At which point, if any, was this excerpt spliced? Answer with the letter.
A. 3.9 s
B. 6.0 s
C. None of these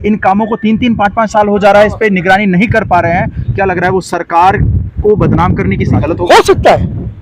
B